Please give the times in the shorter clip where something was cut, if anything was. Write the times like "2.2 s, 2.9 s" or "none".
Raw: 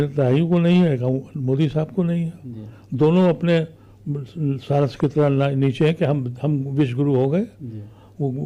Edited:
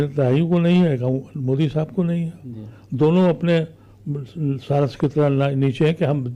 none

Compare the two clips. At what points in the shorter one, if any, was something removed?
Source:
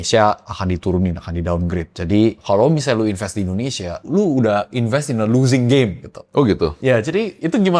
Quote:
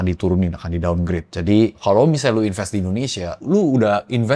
none

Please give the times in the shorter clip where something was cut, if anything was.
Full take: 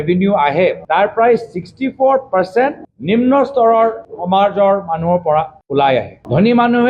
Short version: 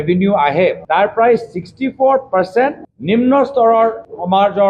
none

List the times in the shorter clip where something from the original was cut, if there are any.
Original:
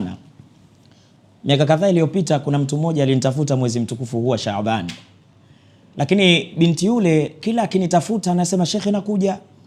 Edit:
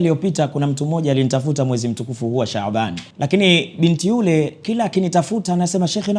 3.0 s

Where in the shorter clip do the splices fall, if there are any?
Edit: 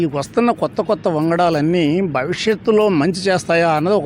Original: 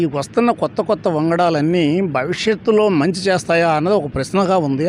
none

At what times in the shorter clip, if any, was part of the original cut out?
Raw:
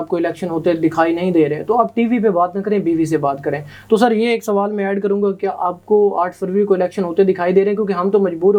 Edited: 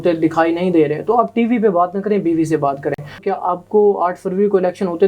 3.2 s

